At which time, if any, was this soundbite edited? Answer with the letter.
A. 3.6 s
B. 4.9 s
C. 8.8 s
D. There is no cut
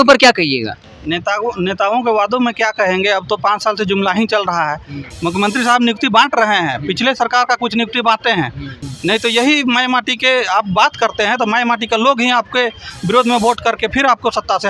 C